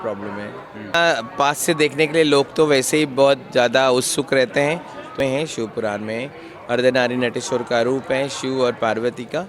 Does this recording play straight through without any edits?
no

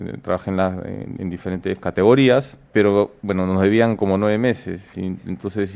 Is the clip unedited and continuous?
no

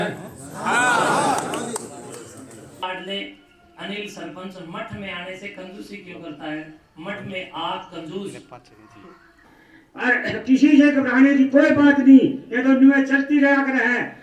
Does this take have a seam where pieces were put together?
yes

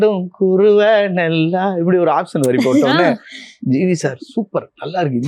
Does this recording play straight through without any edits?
yes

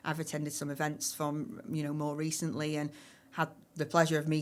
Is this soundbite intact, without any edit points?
yes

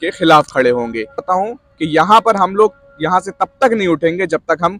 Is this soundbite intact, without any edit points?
no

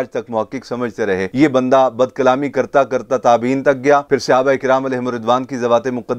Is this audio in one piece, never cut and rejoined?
yes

